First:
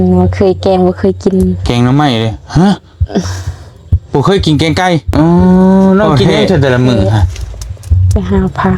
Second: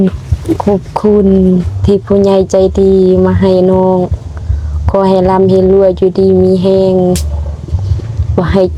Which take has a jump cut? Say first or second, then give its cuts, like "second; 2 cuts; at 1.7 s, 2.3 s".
first; 1 cut; at 5.1 s